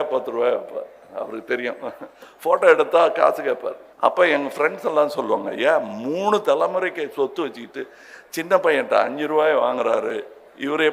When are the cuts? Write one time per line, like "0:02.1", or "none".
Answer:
0:03.8